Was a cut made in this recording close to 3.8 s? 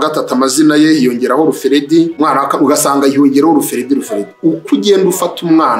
no; 1 cut; at 2.1 s

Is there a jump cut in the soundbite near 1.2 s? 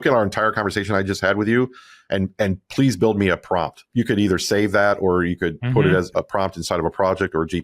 no; 2 cuts; at 3.8 s, 6.1 s

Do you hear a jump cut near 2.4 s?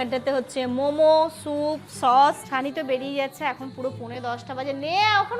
yes; 1 cut; at 2.4 s

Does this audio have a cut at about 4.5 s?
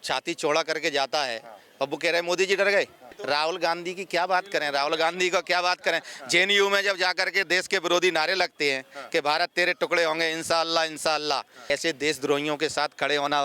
no; 2 cuts; at 3.1 s, 11.7 s

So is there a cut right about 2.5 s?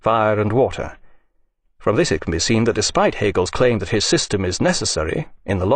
no; 1 cut; at 1.2 s

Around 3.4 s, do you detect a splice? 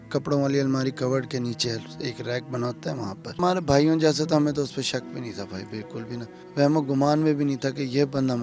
yes; 2 cuts; at 3.4 s, 6.4 s

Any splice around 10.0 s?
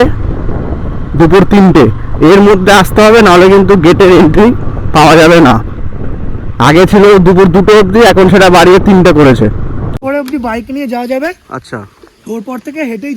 yes; 1 cut; at 10.0 s

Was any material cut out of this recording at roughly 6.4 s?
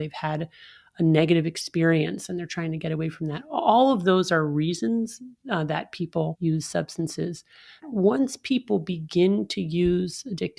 yes; 2 cuts; at 6.4 s, 7.8 s

